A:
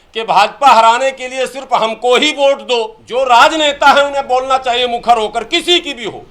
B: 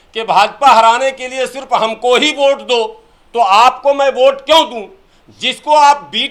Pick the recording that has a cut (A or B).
A